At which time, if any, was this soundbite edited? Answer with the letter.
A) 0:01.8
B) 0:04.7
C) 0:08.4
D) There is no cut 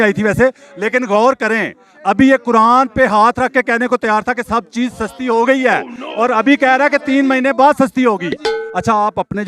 C